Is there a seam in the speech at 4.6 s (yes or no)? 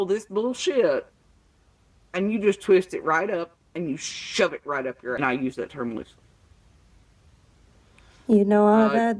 yes